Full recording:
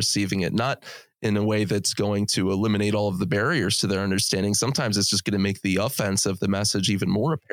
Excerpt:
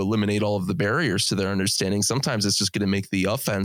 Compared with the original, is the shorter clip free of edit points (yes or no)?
yes